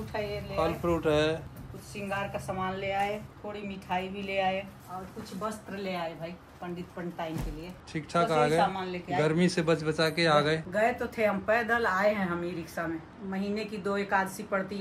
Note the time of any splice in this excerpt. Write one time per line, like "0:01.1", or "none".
0:01.5
0:03.2
0:04.7
0:07.7
0:13.1